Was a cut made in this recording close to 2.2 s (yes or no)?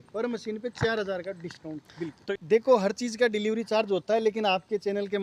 yes